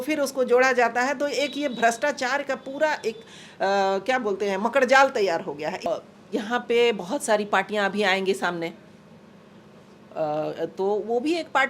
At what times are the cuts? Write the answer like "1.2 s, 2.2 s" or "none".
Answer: 5.8 s